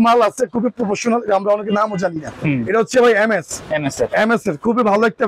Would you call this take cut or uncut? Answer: uncut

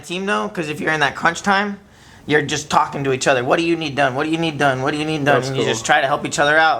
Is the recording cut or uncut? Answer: uncut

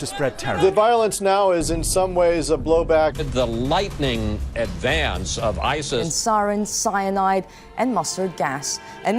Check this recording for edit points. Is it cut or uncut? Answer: cut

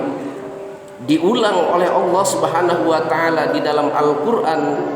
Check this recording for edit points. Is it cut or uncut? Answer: uncut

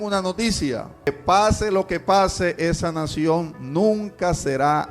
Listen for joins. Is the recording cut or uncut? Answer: cut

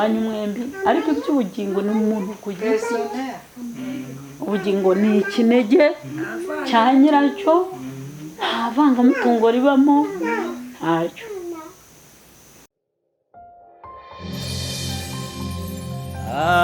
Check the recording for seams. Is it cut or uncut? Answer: cut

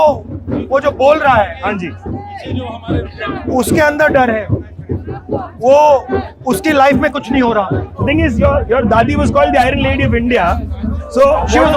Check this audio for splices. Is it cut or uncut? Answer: cut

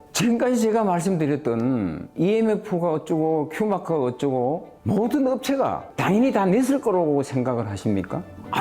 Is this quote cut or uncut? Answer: uncut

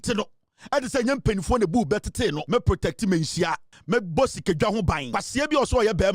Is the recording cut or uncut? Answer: cut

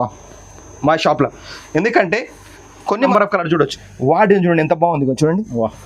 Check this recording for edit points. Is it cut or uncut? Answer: cut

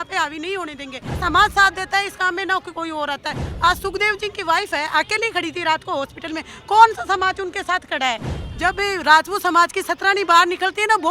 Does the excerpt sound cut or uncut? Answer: cut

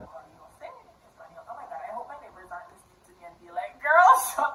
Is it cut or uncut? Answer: uncut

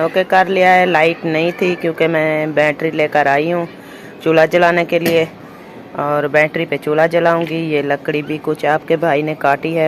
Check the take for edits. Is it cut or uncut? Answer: uncut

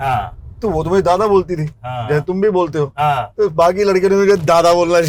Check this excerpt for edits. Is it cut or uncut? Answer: uncut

